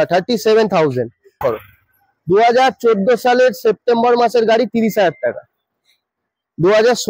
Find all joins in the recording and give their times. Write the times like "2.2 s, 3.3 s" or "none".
1.4 s